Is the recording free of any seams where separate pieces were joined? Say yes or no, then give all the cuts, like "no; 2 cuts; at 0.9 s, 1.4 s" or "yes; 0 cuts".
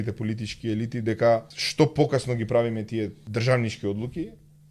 no; 2 cuts; at 1.6 s, 3.2 s